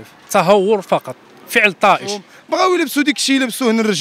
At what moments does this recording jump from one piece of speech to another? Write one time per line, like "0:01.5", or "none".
0:02.3